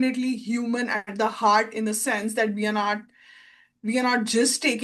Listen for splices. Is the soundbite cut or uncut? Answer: uncut